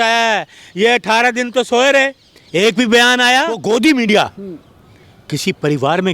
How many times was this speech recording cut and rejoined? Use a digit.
1